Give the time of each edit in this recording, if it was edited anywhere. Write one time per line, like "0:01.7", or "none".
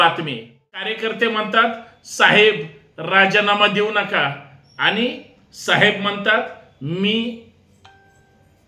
0:00.9